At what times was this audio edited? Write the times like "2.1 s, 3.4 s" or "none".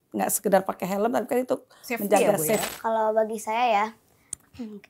2.7 s